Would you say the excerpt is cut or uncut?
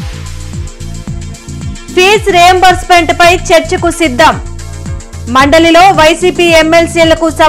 cut